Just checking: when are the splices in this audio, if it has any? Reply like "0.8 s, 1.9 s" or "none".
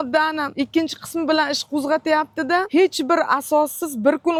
none